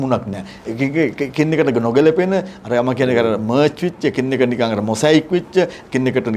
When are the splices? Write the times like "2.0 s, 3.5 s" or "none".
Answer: none